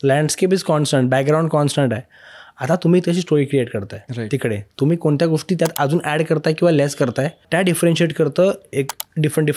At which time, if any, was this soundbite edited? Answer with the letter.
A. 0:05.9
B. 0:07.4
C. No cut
B